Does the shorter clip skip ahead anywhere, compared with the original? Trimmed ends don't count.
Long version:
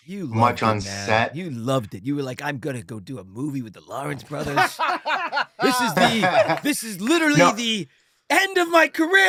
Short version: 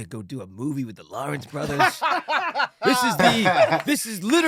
no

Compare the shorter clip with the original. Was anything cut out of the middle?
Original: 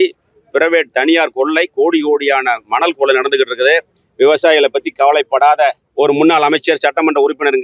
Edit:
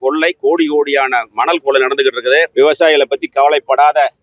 yes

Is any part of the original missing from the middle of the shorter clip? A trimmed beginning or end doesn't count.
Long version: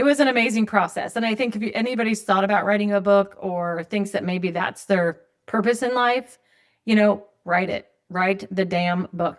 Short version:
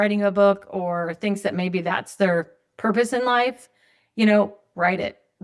no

